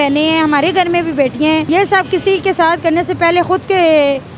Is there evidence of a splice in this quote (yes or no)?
yes